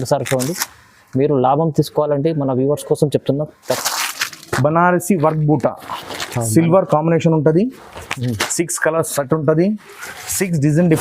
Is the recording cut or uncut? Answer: cut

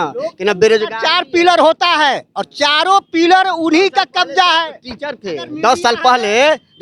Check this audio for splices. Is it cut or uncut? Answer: uncut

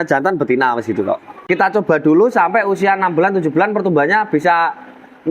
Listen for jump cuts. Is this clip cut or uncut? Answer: cut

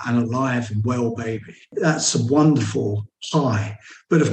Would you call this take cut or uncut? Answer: uncut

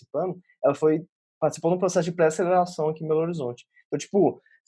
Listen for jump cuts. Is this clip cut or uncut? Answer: uncut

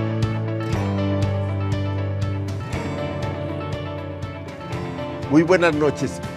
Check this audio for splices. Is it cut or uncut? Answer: cut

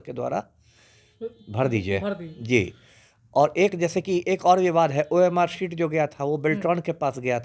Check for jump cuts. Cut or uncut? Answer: uncut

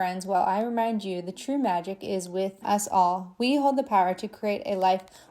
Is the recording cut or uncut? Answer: cut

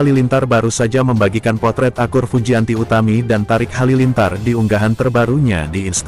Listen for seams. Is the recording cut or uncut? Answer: uncut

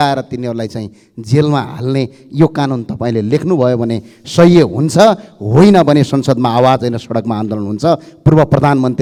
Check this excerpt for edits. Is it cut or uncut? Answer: uncut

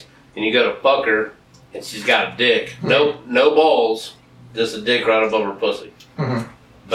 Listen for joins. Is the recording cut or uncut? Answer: uncut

